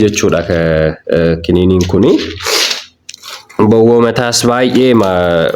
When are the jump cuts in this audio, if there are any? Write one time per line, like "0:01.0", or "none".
none